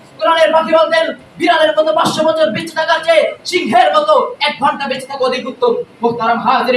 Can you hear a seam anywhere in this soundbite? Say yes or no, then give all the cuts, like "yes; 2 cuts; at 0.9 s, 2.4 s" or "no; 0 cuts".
no; 0 cuts